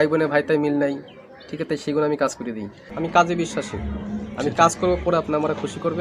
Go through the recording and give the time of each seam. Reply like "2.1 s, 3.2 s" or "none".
2.9 s

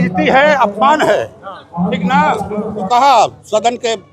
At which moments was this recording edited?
2.8 s

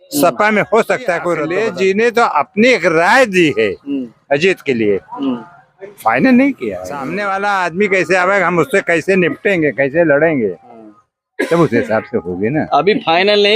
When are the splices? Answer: 1.4 s, 7.1 s

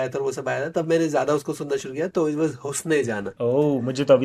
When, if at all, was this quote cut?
3.3 s

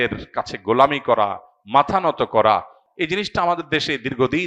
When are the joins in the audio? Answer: 2.8 s

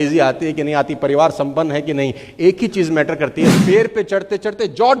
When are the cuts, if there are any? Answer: 3.6 s

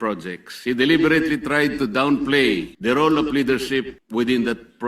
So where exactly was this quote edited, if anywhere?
2.7 s, 4.0 s

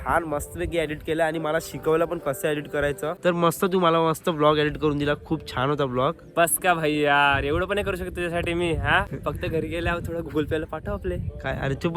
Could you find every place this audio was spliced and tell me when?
3.2 s, 9.1 s

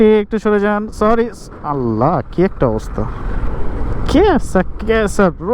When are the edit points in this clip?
3.5 s

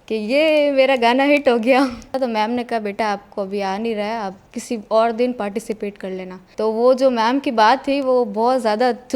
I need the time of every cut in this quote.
2.2 s

